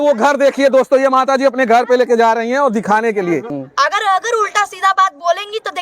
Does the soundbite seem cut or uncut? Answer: cut